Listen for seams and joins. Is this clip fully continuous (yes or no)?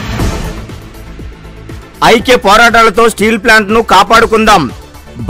yes